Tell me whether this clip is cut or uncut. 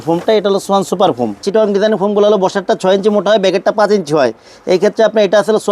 cut